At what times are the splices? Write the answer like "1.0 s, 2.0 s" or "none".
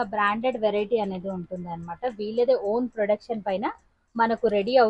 none